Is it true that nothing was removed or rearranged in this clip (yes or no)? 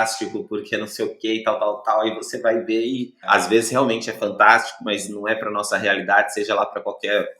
no